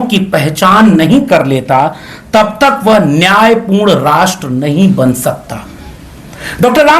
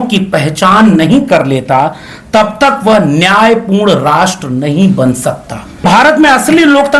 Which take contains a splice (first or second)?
second